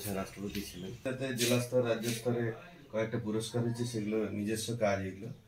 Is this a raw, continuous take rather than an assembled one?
no; 1 cut; at 1.0 s

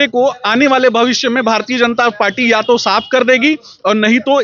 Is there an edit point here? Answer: no; 0 cuts

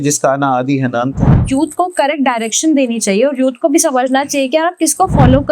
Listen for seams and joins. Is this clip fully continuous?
no; 1 cut; at 1.3 s

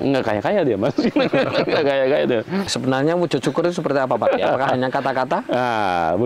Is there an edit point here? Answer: yes; 1 cut; at 2.7 s

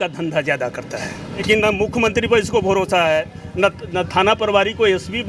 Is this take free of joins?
no; 1 cut; at 1.4 s

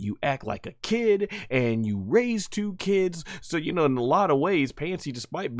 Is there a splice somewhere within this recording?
no; 0 cuts

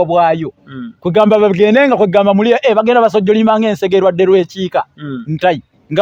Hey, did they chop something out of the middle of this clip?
no; 0 cuts

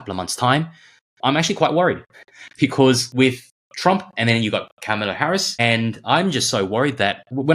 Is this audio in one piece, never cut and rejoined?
no; 1 cut; at 3.5 s

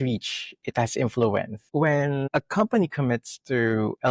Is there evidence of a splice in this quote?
yes; 1 cut; at 2.2 s

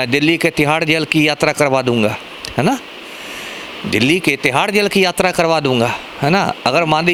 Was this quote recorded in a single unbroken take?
yes; 0 cuts

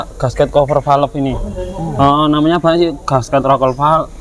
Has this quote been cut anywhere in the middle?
no; 0 cuts

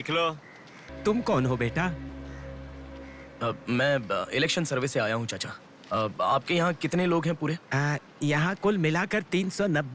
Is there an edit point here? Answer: yes; 2 cuts; at 0.9 s, 2.1 s

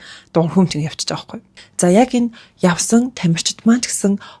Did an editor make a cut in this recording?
yes; 1 cut; at 1.4 s

